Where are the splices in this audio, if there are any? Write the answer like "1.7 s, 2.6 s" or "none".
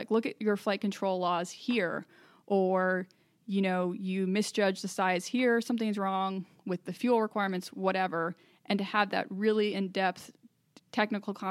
none